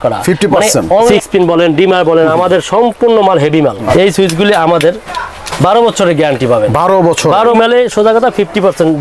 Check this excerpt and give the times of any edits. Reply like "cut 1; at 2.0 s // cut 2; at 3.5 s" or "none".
cut 1; at 1.1 s // cut 2; at 3.9 s // cut 3; at 7.5 s